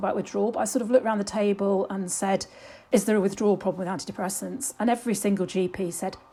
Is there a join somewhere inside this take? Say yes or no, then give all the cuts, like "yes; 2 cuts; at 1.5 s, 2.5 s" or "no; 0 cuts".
no; 0 cuts